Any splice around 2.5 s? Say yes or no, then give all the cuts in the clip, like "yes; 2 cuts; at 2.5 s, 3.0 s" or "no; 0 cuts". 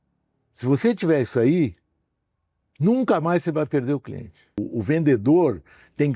no; 1 cut; at 4.6 s